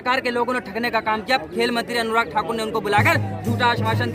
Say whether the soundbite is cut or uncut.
uncut